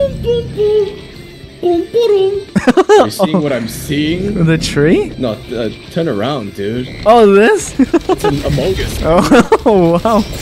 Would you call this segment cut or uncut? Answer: cut